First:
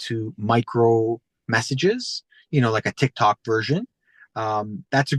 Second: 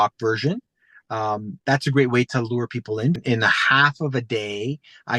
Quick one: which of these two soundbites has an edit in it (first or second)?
second